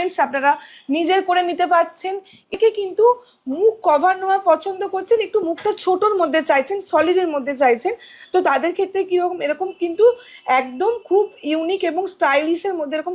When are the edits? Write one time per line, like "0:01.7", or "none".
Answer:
0:02.5